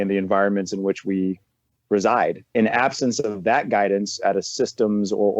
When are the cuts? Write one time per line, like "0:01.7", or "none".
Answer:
0:02.5